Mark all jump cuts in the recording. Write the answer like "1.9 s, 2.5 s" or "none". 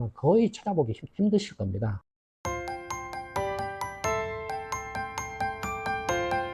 2.1 s